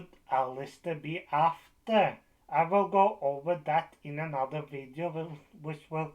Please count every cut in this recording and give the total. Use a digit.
0